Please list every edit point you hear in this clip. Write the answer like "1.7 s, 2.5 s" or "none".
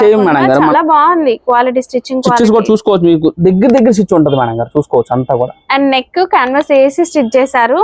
none